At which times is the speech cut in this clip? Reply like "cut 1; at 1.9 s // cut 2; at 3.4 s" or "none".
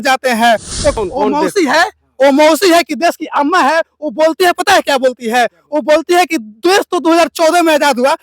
cut 1; at 1.0 s